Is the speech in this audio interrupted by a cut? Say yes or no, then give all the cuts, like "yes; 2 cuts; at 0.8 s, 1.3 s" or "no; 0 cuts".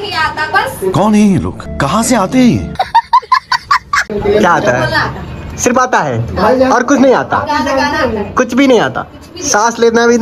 no; 0 cuts